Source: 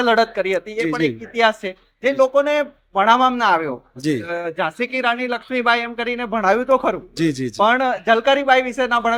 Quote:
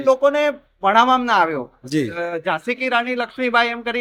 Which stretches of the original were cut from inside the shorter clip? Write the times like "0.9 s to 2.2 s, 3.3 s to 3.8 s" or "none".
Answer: none

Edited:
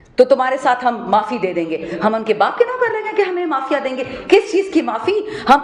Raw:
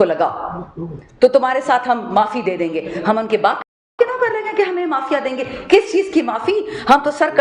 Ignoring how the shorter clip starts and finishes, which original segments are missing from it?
3.6 s to 3.9 s

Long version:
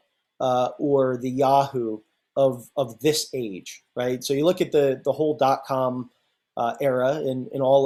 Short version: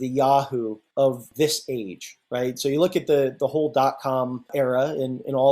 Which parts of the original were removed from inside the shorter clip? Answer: 2.4 s to 2.8 s, 6.1 s to 6.8 s

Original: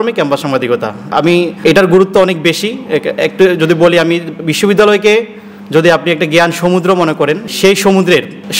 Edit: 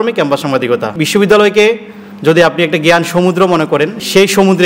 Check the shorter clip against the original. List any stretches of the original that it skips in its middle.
0.9 s to 4.4 s

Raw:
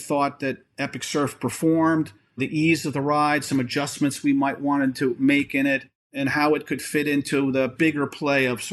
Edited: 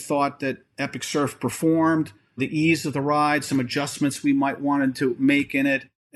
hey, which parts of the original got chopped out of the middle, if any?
none

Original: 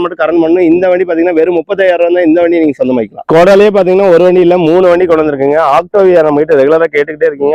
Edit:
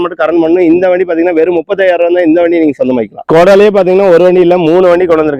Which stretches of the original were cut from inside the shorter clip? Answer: none

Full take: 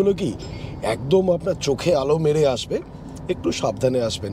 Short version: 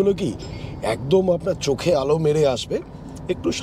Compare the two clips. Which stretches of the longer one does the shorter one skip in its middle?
none

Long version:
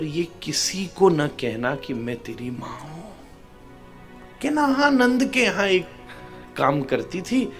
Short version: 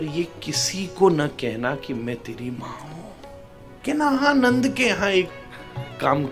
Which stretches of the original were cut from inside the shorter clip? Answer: 3.7 s to 4.3 s

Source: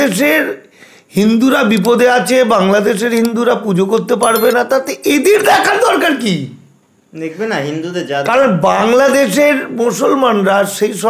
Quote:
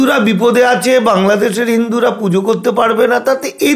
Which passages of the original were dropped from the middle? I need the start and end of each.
none

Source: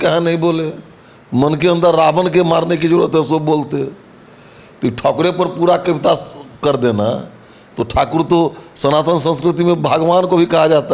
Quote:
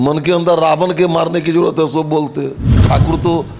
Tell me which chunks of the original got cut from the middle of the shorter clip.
4.1 s to 7.8 s

